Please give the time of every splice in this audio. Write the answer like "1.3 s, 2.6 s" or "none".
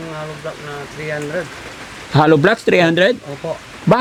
none